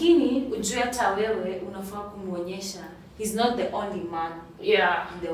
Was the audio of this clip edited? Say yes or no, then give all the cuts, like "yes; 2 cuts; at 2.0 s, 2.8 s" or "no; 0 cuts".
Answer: no; 0 cuts